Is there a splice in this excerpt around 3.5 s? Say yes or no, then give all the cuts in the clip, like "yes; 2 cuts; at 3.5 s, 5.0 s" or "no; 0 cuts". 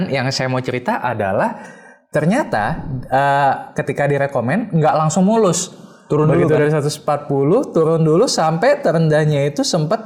no; 0 cuts